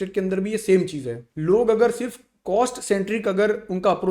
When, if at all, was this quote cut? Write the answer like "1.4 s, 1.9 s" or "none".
1.2 s